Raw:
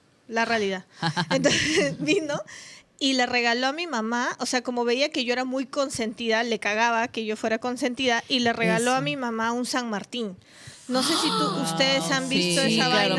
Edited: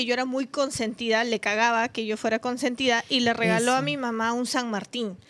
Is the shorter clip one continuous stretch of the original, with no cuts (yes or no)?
yes